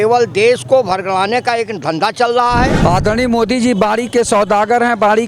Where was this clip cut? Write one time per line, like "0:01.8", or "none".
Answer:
0:02.8